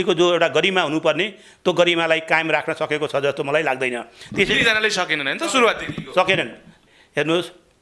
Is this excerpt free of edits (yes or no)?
no